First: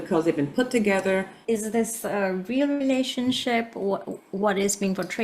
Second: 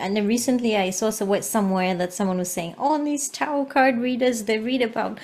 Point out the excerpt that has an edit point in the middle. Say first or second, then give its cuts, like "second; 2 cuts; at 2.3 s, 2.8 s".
first; 1 cut; at 1.3 s